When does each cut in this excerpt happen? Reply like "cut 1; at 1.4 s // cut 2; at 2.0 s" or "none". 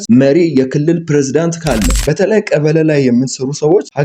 cut 1; at 2.0 s